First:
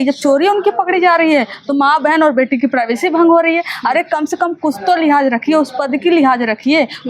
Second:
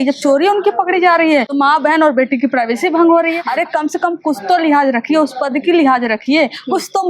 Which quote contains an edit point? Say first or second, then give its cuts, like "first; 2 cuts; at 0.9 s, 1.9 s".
second; 2 cuts; at 1.5 s, 3.4 s